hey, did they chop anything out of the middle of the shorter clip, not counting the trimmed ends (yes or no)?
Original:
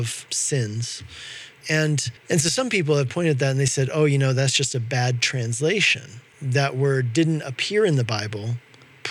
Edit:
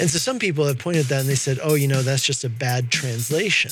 no